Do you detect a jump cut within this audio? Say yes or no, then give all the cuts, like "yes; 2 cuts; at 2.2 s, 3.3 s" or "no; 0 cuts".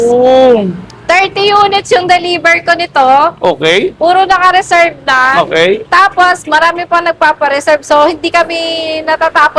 no; 0 cuts